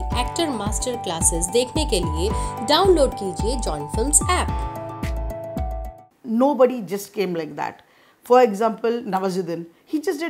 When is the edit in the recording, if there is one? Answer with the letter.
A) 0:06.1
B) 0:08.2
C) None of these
A